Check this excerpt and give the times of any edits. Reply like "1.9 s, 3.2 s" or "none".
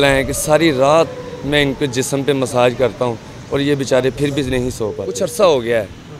5.0 s